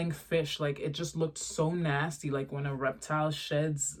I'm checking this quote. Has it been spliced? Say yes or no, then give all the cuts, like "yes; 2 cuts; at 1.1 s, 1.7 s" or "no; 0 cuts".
no; 0 cuts